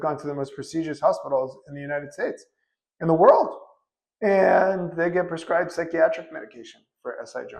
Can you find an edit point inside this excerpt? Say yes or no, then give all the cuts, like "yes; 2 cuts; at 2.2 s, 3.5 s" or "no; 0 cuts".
no; 0 cuts